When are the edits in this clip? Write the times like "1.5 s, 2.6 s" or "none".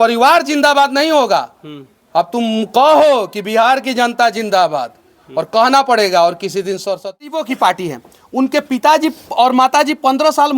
7.4 s